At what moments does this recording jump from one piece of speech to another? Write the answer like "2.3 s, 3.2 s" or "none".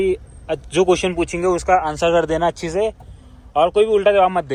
none